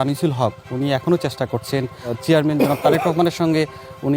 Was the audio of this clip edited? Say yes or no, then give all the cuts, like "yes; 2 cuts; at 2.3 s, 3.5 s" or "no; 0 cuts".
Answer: yes; 1 cut; at 2.1 s